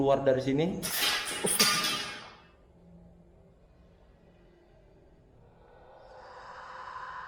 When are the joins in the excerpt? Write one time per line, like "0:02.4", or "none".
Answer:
0:06.1